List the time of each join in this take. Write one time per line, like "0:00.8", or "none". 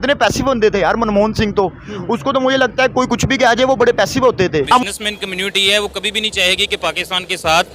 0:04.8